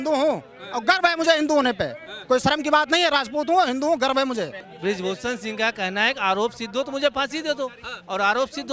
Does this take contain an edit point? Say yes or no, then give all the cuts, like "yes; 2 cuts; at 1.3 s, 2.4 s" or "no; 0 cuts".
yes; 1 cut; at 4.6 s